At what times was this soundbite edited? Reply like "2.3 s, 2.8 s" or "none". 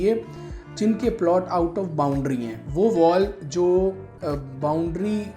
2.6 s